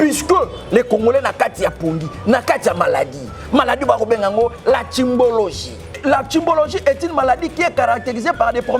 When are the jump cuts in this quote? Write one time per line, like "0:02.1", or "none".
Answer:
0:05.9

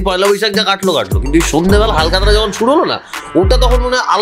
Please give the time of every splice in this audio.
none

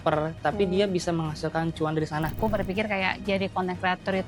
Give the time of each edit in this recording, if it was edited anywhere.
0:02.4

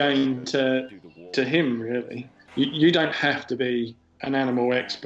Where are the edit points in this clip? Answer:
0:02.3
0:04.1

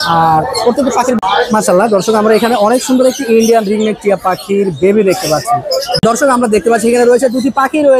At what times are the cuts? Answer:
0:01.2
0:05.9

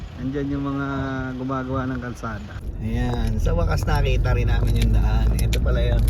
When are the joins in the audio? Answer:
0:02.7

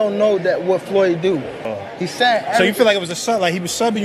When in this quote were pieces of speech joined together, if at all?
none

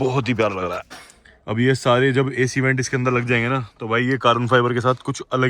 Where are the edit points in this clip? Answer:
0:00.9

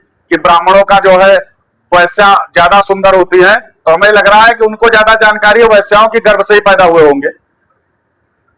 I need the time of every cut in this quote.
none

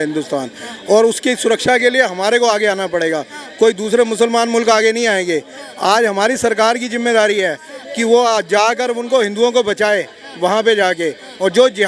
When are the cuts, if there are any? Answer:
none

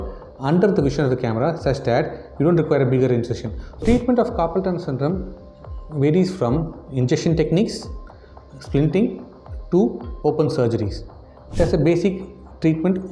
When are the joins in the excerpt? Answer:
0:03.8
0:11.3

